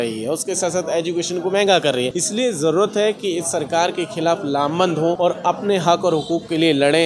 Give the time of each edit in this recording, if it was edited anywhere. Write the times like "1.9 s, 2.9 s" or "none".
2.2 s, 5.2 s